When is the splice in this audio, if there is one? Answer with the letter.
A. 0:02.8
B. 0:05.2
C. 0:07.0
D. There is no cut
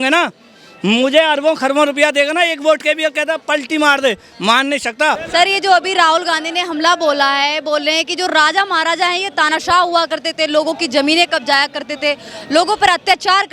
B